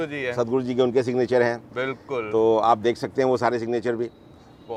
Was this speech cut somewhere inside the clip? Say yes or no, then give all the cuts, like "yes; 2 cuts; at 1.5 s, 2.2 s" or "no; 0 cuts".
no; 0 cuts